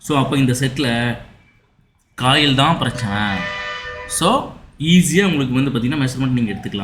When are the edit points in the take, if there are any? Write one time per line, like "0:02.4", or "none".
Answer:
none